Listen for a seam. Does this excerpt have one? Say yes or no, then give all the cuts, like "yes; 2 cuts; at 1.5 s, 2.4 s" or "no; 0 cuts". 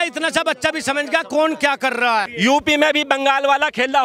yes; 1 cut; at 2.3 s